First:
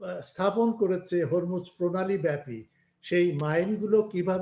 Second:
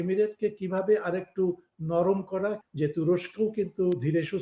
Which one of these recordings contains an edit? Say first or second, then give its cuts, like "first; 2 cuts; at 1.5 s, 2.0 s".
second; 1 cut; at 2.6 s